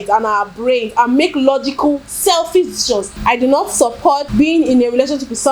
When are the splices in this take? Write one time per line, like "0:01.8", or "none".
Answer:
0:03.1
0:04.3